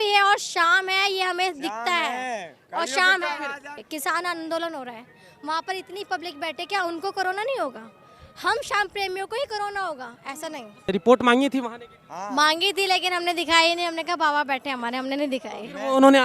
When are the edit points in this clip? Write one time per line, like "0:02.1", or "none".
0:03.7
0:10.9